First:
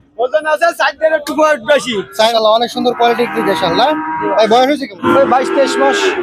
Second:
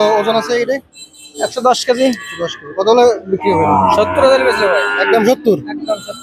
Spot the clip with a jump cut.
first; 2 cuts; at 2.3 s, 4.9 s

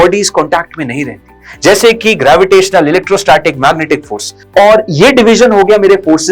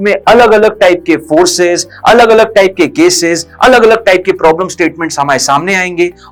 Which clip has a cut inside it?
first; 1 cut; at 4.3 s

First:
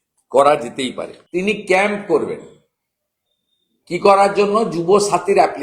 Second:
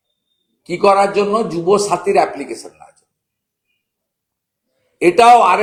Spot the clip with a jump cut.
first; 1 cut; at 1.1 s

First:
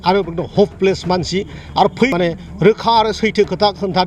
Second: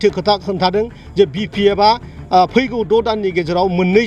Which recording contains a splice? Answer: first; 1 cut; at 2.1 s

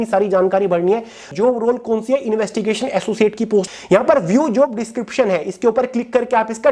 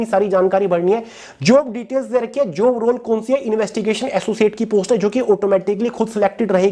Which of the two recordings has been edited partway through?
first; 2 cuts; at 1.3 s, 3.7 s

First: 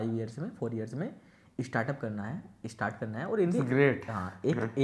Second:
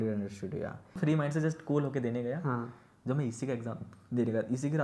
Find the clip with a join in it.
second; 1 cut; at 1.0 s

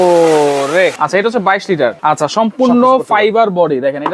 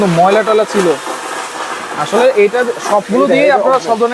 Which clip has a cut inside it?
first; 2 cuts; at 1.0 s, 2.0 s

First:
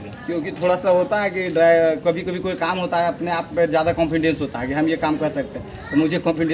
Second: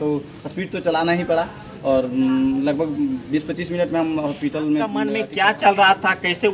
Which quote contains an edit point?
second; 1 cut; at 5.2 s

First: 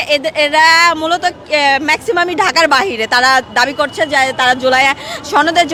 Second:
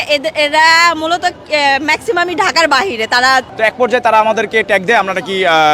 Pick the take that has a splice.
second; 1 cut; at 3.5 s

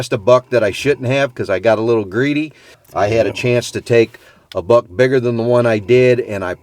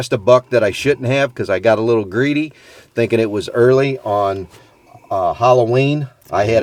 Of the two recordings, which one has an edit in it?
first; 1 cut; at 2.8 s

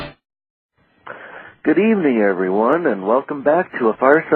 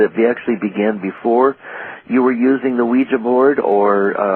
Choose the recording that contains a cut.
second; 1 cut; at 3.2 s

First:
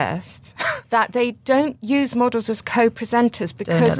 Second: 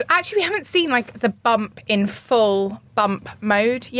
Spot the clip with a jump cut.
first; 1 cut; at 1.8 s

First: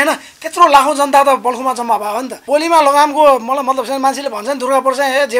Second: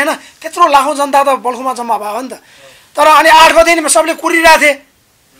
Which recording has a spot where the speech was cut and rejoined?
first; 1 cut; at 2.4 s

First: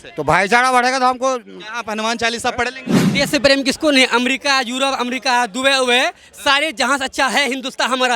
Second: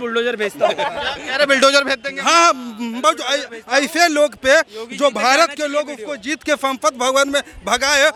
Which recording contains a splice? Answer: first; 1 cut; at 3.1 s

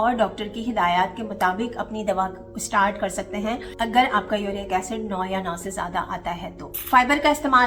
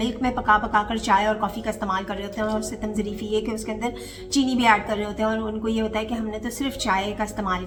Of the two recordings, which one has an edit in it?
first; 1 cut; at 6.8 s

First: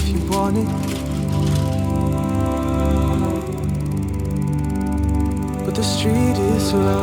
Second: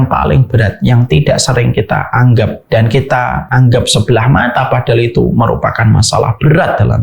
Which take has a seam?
second; 2 cuts; at 2.6 s, 3.4 s

